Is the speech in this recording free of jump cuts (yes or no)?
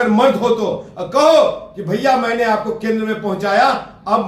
yes